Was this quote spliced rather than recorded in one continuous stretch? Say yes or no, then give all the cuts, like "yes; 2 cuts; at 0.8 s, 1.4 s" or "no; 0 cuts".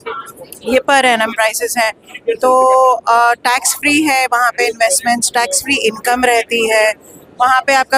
no; 0 cuts